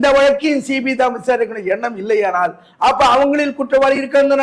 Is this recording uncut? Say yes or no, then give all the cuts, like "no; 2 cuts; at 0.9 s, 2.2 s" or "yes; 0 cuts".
yes; 0 cuts